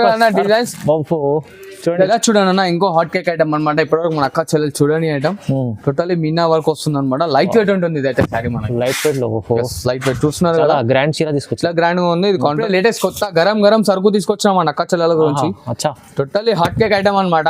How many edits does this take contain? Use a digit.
2